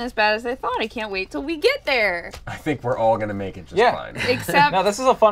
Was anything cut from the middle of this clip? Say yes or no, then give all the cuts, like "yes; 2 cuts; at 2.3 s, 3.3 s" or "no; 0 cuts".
no; 0 cuts